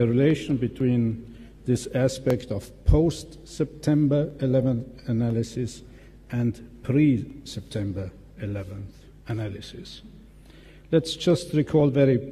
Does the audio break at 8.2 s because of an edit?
yes; 1 cut; at 8.2 s

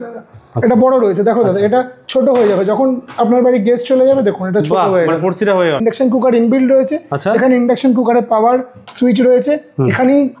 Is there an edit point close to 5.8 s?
yes; 1 cut; at 5.8 s

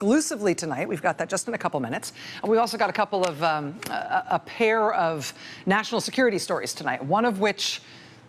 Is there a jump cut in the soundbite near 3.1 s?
no; 0 cuts

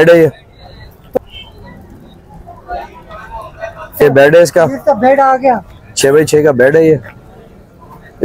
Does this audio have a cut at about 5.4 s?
no; 2 cuts; at 0.9 s, 4.0 s

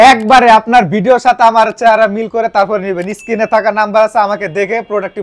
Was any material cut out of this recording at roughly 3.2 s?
no; 0 cuts

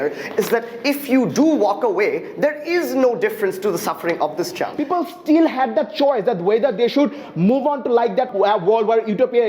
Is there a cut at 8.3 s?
yes; 2 cuts; at 4.7 s, 8.3 s

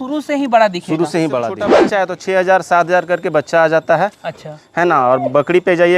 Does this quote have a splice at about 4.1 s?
no; 1 cut; at 1.7 s

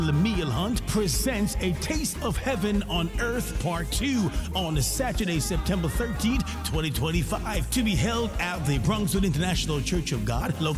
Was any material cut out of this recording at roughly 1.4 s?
no; 0 cuts

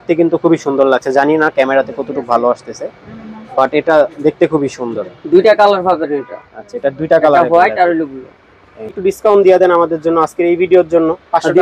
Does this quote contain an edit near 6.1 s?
no; 1 cut; at 9.0 s

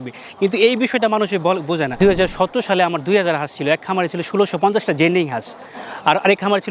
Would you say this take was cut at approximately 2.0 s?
yes; 1 cut; at 2.0 s

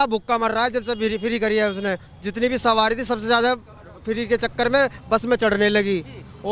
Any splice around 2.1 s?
no; 0 cuts

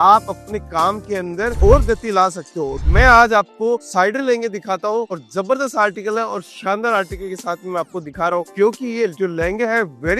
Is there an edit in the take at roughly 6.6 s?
no; 1 cut; at 2.9 s

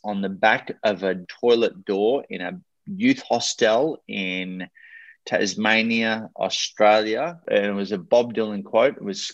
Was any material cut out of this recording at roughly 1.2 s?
yes; 2 cuts; at 1.2 s, 7.4 s

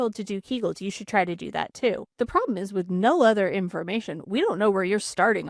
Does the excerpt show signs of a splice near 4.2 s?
no; 1 cut; at 2.1 s

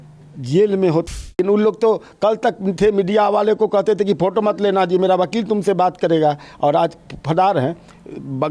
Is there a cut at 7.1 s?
no; 1 cut; at 1.0 s

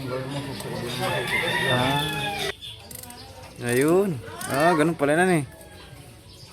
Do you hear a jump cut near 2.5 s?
yes; 1 cut; at 2.5 s

